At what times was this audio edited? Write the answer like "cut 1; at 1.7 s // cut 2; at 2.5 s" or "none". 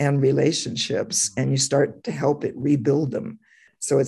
none